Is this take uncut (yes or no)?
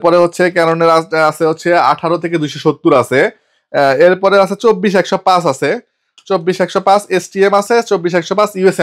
yes